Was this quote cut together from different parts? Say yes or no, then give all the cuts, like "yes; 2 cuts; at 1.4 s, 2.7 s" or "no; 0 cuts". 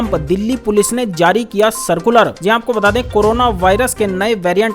no; 0 cuts